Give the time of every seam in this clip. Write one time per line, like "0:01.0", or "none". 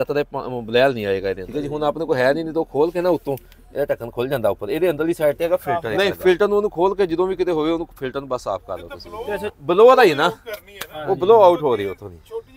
0:01.5
0:05.8
0:09.5